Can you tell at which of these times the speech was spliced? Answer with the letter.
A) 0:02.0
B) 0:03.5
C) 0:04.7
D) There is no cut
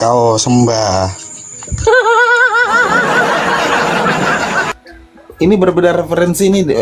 C